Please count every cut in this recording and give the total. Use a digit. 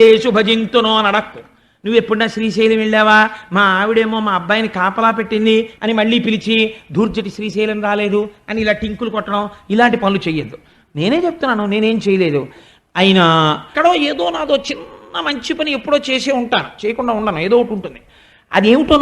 2